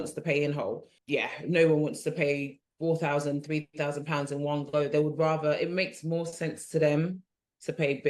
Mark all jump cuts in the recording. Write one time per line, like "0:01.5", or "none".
0:00.9
0:02.6